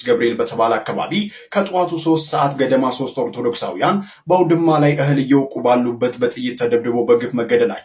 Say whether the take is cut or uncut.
uncut